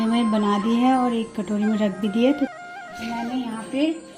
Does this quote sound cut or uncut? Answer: cut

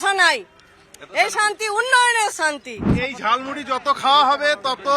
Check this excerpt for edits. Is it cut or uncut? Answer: cut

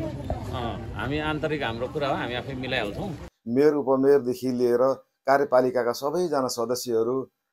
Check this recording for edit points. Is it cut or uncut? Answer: cut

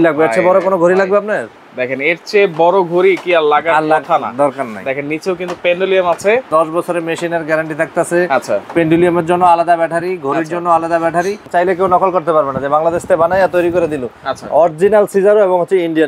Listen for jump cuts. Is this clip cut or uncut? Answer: cut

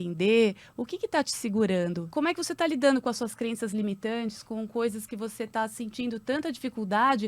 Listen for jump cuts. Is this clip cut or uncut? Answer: cut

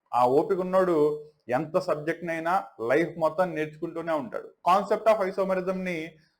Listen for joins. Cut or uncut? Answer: cut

